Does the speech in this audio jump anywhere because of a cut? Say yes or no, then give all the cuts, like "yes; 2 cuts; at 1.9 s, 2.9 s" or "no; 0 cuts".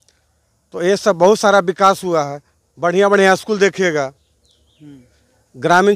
no; 0 cuts